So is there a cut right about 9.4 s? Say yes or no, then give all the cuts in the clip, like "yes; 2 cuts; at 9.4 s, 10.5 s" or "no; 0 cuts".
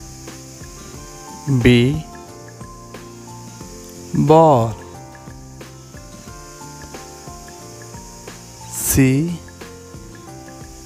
yes; 6 cuts; at 1.4 s, 2.6 s, 4.1 s, 5.2 s, 8.8 s, 9.4 s